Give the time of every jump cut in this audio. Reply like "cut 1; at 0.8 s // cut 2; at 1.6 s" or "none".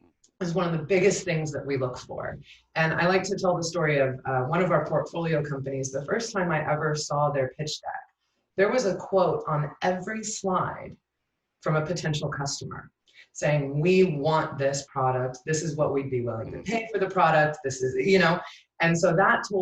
none